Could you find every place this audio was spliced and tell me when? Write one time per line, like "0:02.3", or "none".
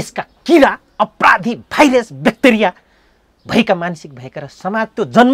none